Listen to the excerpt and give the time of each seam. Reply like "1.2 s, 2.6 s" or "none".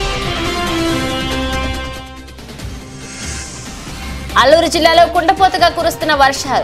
1.9 s, 3.6 s